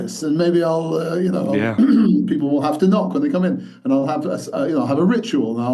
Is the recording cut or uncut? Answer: uncut